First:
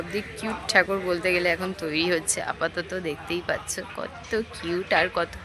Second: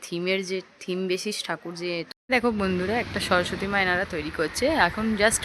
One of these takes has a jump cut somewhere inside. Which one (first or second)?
second